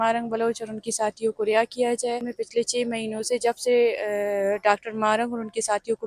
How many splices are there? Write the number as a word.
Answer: one